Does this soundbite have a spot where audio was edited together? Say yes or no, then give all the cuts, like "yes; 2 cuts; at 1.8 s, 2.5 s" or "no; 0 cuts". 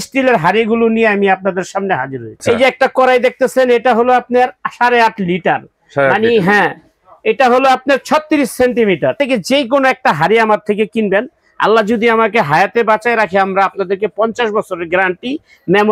yes; 2 cuts; at 2.4 s, 9.2 s